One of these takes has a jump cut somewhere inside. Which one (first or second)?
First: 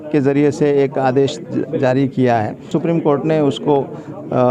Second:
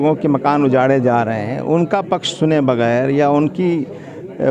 first